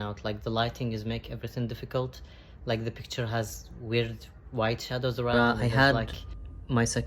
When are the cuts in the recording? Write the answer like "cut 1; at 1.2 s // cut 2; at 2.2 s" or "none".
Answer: cut 1; at 5.3 s